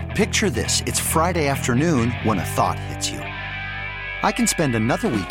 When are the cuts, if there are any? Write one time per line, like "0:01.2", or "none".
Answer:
none